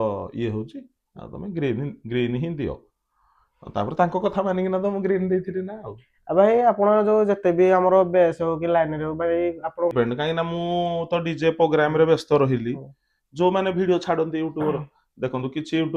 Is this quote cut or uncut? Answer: cut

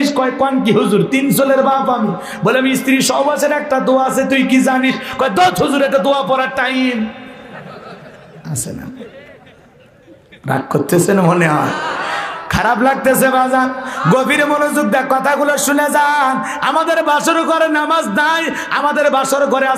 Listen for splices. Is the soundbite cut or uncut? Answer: uncut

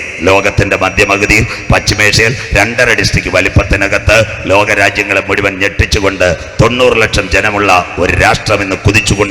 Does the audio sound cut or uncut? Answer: uncut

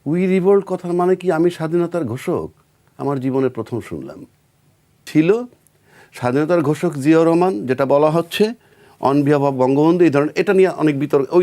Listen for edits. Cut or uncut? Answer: cut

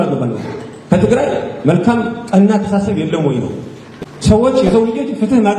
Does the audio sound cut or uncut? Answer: uncut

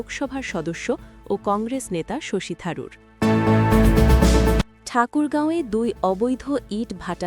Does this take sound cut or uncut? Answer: cut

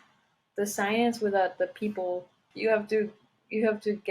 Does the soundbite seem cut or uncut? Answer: cut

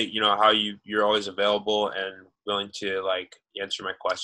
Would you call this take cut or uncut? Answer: uncut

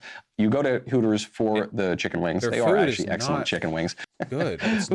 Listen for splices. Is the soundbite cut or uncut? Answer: cut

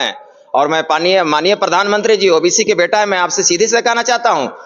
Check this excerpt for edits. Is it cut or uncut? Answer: uncut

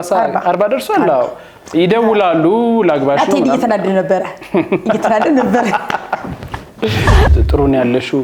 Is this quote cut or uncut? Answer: cut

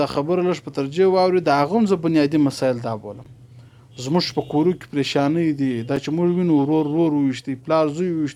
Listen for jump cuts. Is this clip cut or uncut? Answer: uncut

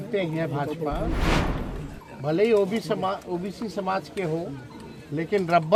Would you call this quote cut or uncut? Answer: uncut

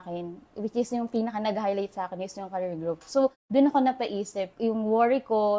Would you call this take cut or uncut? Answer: uncut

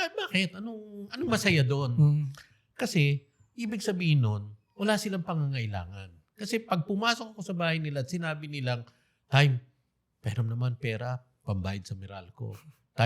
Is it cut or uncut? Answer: uncut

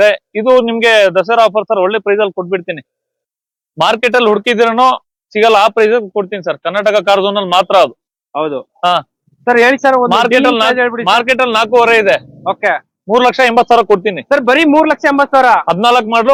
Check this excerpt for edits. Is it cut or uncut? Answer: uncut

